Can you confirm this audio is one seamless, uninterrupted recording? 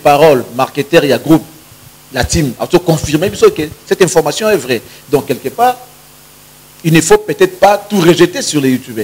yes; 0 cuts

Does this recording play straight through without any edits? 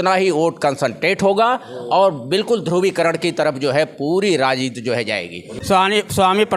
no; 1 cut; at 5.5 s

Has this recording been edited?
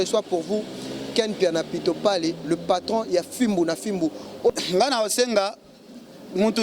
yes; 1 cut; at 4.5 s

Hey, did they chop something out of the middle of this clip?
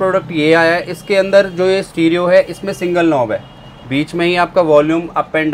no; 0 cuts

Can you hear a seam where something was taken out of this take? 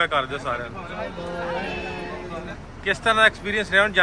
no; 0 cuts

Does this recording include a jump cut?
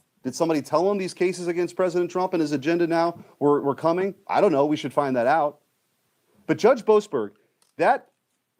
no; 0 cuts

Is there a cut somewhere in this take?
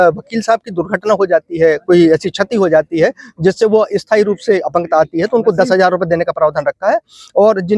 no; 0 cuts

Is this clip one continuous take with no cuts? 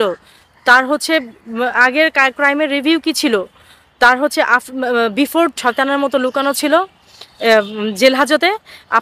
no; 1 cut; at 5.5 s

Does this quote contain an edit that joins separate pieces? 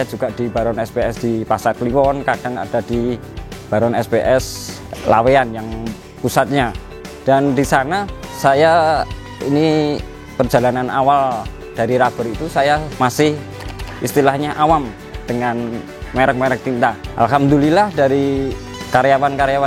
no; 0 cuts

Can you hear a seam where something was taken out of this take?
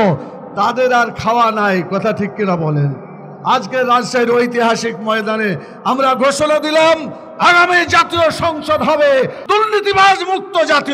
yes; 1 cut; at 9.4 s

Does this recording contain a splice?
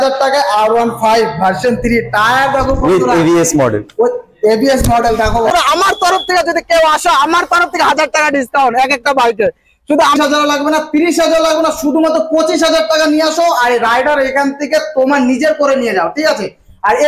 yes; 2 cuts; at 5.5 s, 10.2 s

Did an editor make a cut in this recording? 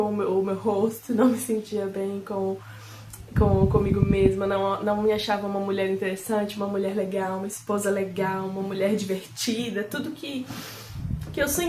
no; 0 cuts

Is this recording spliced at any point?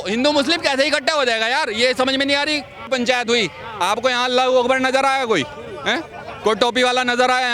yes; 1 cut; at 2.9 s

